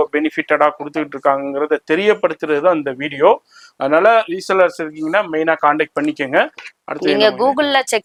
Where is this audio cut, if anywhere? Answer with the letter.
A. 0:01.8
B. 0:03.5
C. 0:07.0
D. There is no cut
D